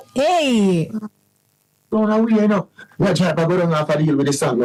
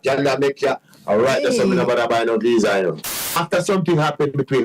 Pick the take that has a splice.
second; 1 cut; at 3.0 s

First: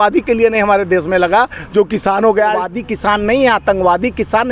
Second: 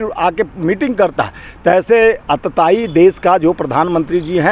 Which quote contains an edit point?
first; 1 cut; at 2.7 s

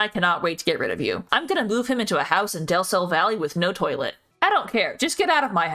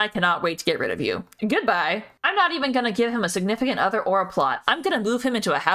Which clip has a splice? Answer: first; 2 cuts; at 1.3 s, 4.2 s

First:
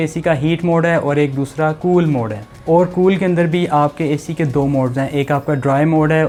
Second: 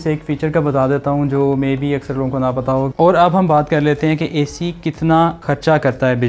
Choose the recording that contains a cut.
second; 1 cut; at 2.9 s

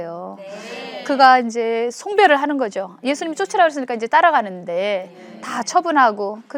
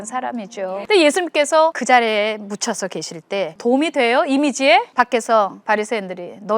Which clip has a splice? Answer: second; 5 cuts; at 0.8 s, 1.8 s, 3.5 s, 4.9 s, 5.6 s

